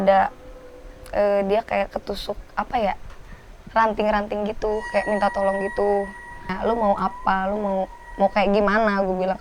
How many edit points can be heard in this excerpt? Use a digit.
1